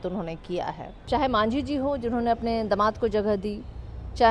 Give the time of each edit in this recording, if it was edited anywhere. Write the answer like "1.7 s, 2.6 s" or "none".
1.0 s